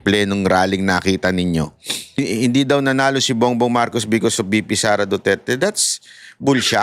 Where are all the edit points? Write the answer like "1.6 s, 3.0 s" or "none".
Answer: 2.2 s